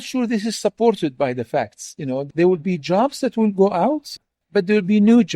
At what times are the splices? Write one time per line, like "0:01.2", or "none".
0:04.1

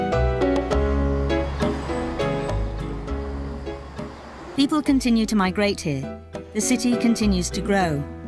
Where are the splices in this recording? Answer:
0:03.8

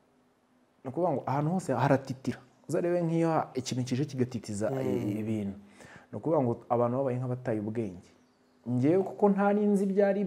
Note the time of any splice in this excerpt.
none

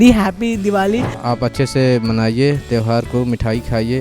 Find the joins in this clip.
0:01.1

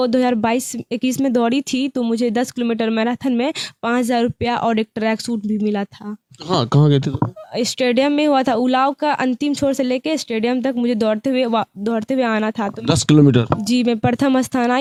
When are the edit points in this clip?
none

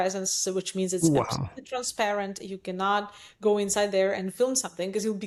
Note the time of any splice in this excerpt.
none

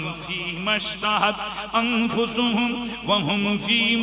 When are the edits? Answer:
none

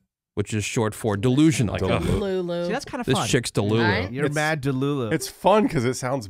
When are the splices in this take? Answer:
0:01.7
0:05.1

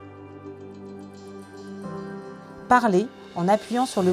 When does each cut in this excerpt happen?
0:02.7

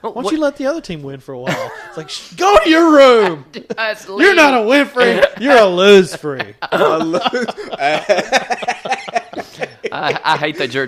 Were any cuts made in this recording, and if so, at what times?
none

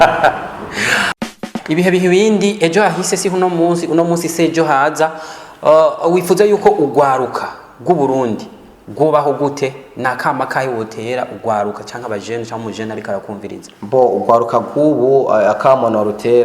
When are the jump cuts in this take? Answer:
0:01.4

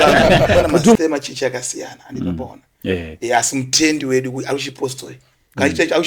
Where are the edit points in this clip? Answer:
0:01.0

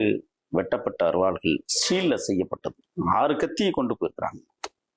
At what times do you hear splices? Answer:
0:02.8

